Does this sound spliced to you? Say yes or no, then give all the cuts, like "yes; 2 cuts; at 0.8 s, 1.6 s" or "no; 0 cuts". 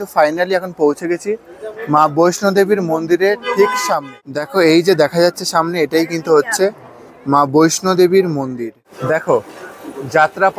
yes; 2 cuts; at 4.4 s, 8.5 s